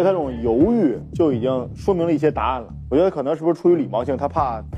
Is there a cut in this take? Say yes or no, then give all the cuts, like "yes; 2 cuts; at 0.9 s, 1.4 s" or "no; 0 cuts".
yes; 2 cuts; at 1.0 s, 2.8 s